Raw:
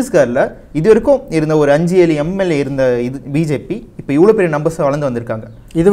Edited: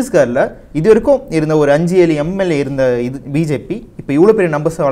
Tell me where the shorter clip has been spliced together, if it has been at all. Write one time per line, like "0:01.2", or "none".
none